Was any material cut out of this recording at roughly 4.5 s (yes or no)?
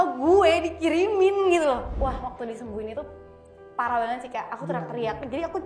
no